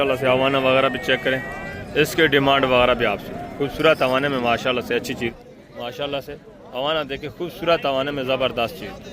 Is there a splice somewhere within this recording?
yes; 1 cut; at 5.2 s

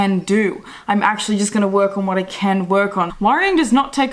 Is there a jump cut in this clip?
yes; 1 cut; at 3.1 s

